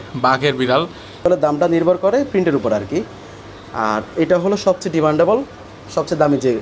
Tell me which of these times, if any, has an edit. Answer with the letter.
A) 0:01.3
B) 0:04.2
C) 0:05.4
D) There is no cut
A